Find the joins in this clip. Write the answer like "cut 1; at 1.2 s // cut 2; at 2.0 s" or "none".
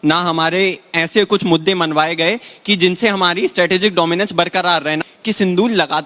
cut 1; at 5.0 s